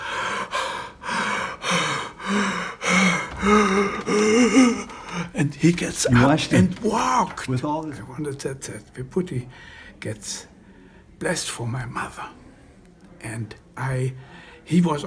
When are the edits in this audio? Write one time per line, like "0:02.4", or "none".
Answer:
0:07.9